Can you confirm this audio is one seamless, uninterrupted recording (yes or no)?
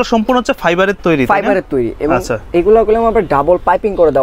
yes